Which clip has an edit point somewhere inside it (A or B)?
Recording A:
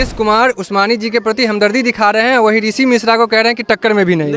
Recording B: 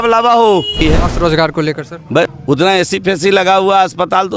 B